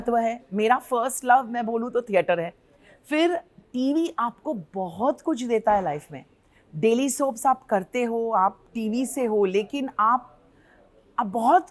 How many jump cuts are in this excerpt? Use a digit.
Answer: 0